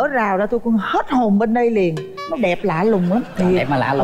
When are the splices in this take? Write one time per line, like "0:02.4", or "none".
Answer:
none